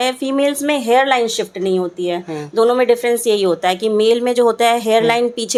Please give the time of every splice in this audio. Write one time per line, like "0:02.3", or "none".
none